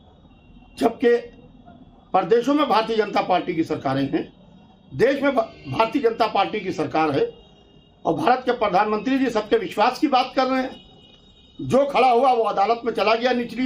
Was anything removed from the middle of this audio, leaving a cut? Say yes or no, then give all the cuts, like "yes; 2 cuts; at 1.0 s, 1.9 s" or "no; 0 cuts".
no; 0 cuts